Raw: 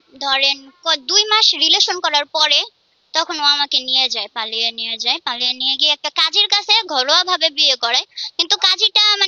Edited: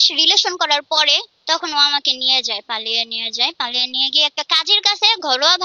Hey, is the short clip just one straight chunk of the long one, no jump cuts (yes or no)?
no